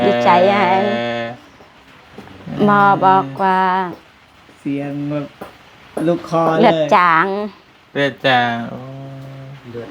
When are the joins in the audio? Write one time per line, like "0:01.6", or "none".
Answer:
none